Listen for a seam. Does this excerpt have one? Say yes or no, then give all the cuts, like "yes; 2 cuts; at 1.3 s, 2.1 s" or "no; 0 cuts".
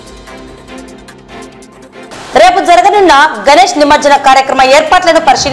yes; 2 cuts; at 1.4 s, 2.1 s